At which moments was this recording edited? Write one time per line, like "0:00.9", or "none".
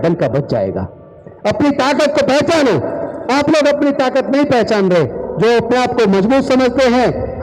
0:05.2